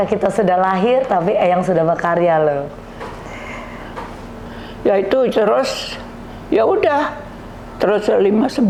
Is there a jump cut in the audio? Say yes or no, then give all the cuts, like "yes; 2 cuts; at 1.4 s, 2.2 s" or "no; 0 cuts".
no; 0 cuts